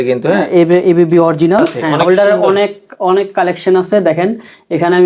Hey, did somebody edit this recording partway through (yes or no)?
yes